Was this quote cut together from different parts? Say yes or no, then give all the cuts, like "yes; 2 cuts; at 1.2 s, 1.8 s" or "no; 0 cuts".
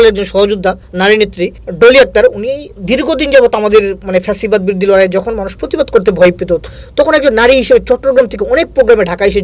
yes; 2 cuts; at 0.9 s, 1.6 s